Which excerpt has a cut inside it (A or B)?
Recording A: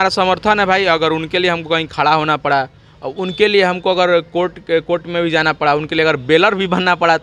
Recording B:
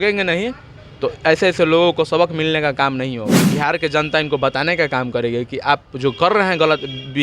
B